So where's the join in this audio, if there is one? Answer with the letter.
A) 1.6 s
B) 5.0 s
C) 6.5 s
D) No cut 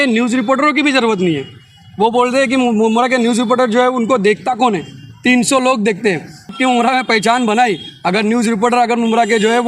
C